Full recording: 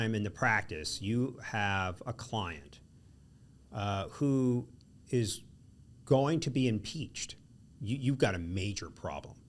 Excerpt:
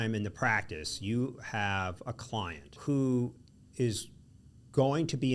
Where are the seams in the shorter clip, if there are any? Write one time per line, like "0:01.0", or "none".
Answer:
0:02.8

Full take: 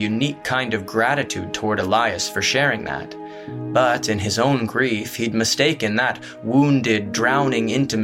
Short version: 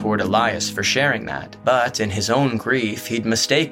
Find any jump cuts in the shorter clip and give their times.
0:01.4

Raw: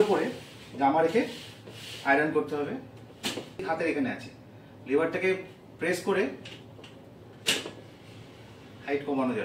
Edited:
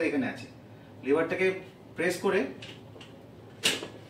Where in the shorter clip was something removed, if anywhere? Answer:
none

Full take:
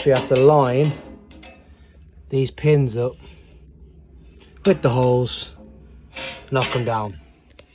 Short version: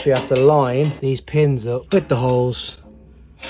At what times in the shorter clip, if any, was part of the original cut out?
0:01.0
0:01.8

